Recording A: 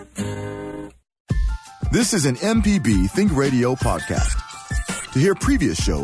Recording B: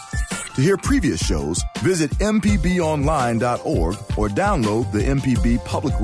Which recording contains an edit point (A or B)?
A